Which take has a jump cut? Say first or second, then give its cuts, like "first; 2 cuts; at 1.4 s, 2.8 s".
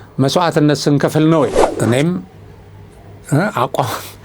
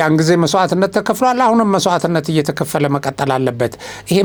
first; 1 cut; at 1.6 s